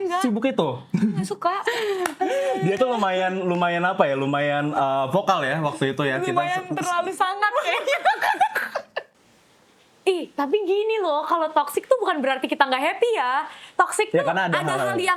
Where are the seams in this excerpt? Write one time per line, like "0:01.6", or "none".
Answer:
0:01.6
0:09.0